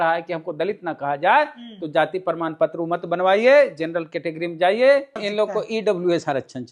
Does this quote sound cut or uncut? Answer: cut